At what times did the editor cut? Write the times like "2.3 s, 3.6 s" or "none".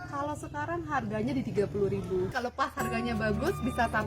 2.4 s